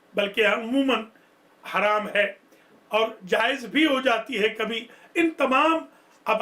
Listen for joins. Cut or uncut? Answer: uncut